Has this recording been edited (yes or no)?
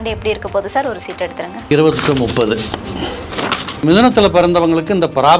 yes